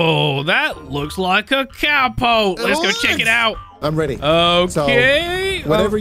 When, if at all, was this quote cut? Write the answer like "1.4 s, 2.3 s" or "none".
3.7 s